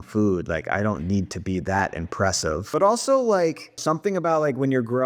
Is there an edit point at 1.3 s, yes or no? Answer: no